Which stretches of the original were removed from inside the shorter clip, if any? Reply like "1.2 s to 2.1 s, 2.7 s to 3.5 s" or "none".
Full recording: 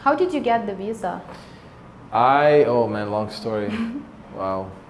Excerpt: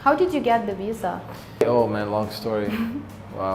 1.6 s to 2.6 s